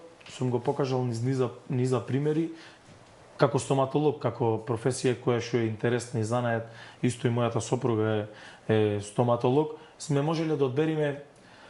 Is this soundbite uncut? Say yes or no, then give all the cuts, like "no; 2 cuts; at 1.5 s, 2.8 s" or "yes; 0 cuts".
yes; 0 cuts